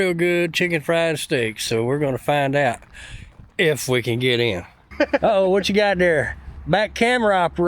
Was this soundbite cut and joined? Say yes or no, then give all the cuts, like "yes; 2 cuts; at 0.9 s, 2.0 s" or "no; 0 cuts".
yes; 1 cut; at 4.8 s